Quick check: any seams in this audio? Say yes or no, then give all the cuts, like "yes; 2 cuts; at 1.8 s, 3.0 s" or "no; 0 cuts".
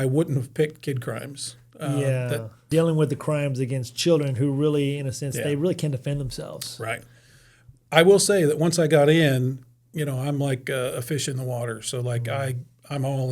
yes; 1 cut; at 2.7 s